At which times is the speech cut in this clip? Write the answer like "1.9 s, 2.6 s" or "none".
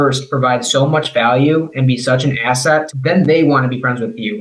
none

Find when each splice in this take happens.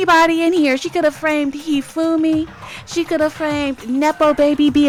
none

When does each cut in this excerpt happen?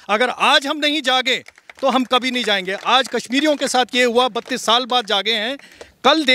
none

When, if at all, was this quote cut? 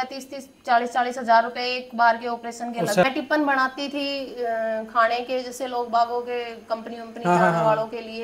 3.0 s

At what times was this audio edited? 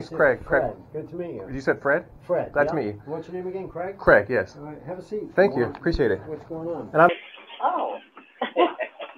7.1 s

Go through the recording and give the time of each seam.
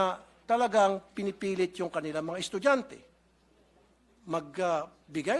none

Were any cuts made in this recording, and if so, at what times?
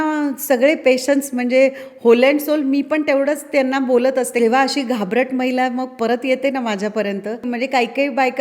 4.4 s, 7.5 s

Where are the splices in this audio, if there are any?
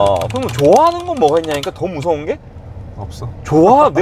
none

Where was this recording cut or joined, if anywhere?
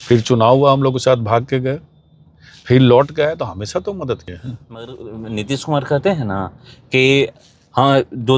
none

